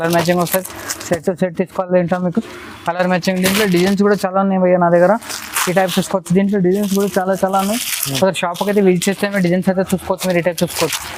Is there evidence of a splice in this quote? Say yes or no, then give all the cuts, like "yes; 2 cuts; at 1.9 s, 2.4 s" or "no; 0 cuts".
no; 0 cuts